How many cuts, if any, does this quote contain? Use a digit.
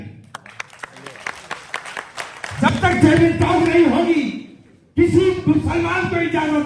0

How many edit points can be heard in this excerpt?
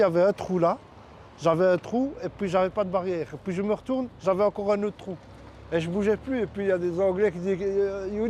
0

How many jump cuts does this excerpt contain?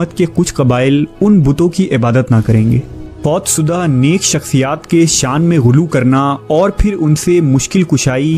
1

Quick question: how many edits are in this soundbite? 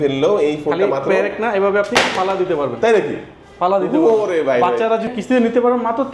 1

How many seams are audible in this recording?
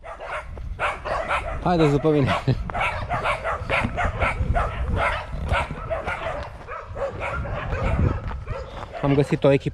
0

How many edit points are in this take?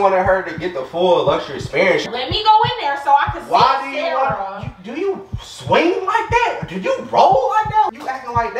2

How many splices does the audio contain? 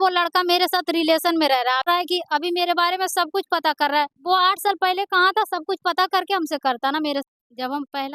2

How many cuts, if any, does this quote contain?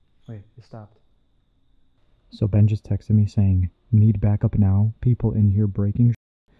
1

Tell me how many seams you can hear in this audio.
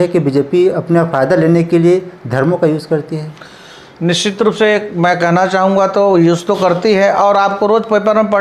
0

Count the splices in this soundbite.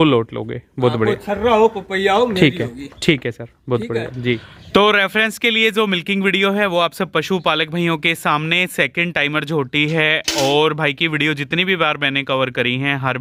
0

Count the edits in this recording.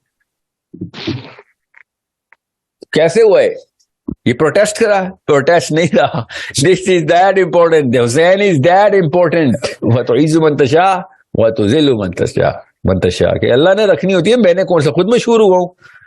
1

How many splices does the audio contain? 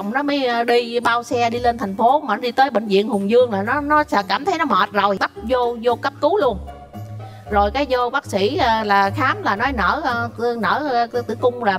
1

